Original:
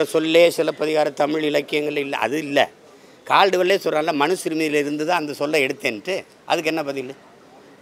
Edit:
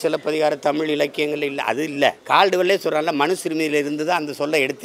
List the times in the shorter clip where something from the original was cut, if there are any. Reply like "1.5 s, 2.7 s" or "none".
2.2 s